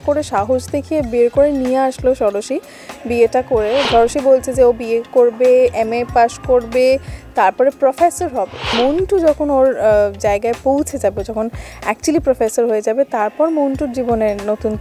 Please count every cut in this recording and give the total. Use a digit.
2